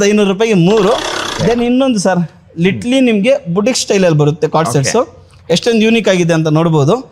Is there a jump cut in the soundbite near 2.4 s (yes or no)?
no